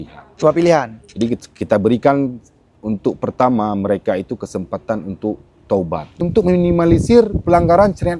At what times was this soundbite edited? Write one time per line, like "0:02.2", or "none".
0:06.1